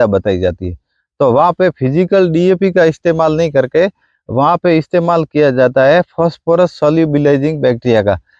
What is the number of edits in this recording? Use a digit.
0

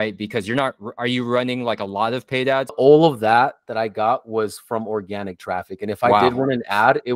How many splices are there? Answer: 1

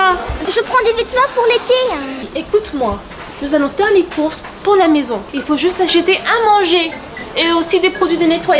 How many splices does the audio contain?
2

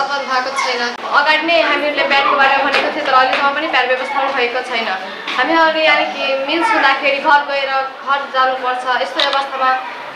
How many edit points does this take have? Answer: 1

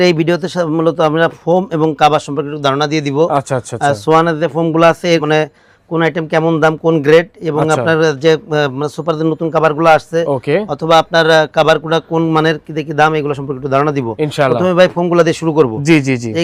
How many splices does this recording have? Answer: 0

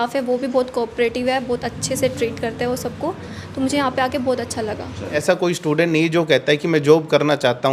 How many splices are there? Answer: 1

